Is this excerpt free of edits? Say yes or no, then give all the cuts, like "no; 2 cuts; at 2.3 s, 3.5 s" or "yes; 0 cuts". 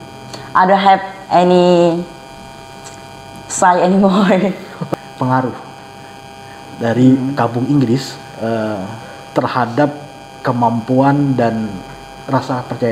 no; 1 cut; at 4.9 s